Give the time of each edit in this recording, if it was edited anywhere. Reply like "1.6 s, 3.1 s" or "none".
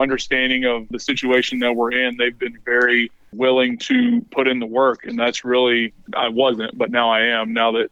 0.9 s, 3.3 s, 4.3 s, 6.0 s